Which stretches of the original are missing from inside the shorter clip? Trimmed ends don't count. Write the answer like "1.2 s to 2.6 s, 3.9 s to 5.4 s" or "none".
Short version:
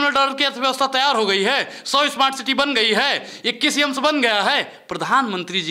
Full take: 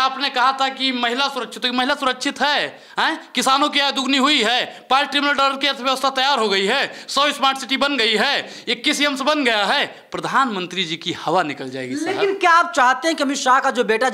none